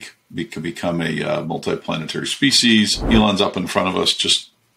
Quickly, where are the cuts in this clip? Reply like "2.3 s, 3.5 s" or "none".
3.0 s